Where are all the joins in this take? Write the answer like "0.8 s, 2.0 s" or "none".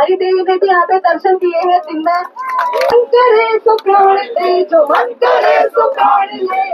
2.9 s